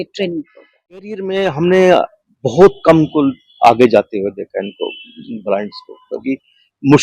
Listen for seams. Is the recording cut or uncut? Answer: cut